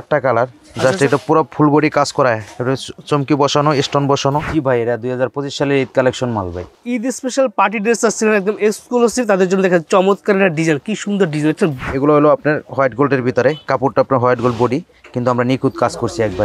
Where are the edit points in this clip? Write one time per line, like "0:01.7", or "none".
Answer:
0:04.5
0:06.8
0:11.8